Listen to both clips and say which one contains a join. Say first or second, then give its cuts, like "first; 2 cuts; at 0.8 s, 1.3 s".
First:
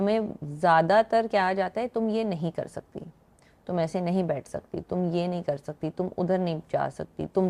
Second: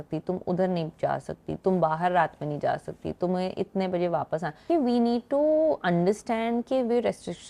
second; 1 cut; at 4.7 s